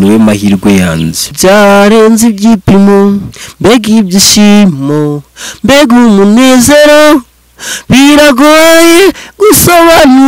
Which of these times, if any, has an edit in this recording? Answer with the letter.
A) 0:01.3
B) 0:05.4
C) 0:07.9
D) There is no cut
A